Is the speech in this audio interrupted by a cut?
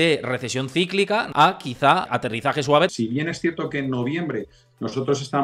yes; 3 cuts; at 1.3 s, 2.1 s, 2.9 s

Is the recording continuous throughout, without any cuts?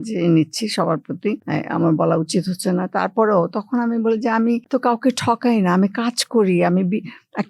yes; 0 cuts

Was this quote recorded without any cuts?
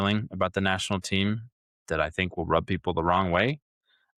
yes; 0 cuts

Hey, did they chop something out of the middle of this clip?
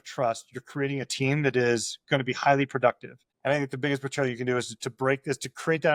no; 0 cuts

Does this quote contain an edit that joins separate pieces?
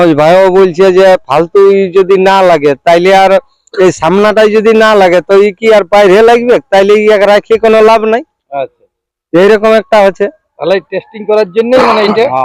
no; 0 cuts

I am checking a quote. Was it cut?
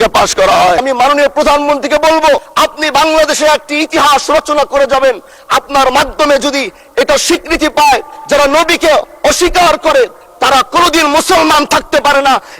yes; 2 cuts; at 0.8 s, 2.5 s

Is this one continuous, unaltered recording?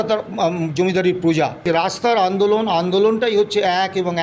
no; 1 cut; at 1.6 s

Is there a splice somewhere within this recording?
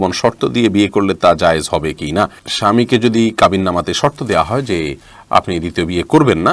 no; 0 cuts

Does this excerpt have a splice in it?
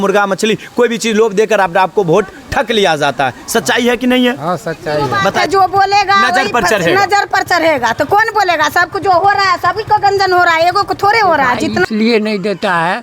yes; 2 cuts; at 5.4 s, 11.9 s

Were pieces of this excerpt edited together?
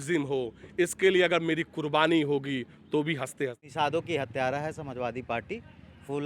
yes; 1 cut; at 3.6 s

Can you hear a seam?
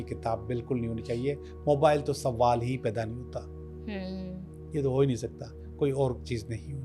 no; 0 cuts

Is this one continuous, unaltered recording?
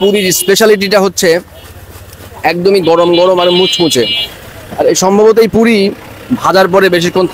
yes; 0 cuts

